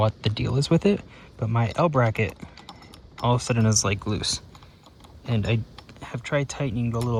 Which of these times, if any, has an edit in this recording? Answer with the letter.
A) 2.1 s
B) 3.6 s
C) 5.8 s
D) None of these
D